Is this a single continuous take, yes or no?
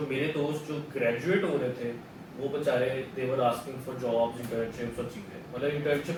yes